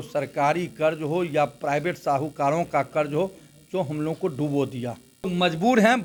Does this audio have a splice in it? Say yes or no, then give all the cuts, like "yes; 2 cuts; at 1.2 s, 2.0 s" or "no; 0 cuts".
no; 0 cuts